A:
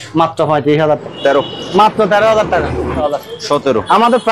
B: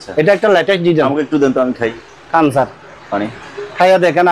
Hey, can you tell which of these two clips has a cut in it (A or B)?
A